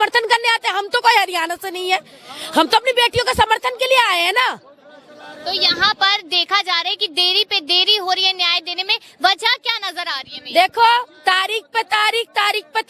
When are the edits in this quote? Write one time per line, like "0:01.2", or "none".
none